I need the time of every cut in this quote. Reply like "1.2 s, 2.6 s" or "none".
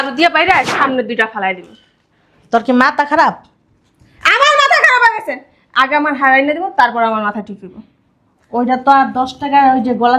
none